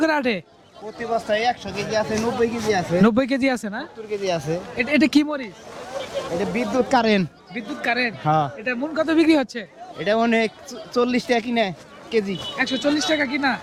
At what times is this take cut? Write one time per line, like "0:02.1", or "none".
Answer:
none